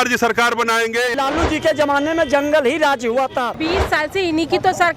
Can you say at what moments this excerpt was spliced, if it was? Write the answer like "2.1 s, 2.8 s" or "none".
1.1 s, 3.6 s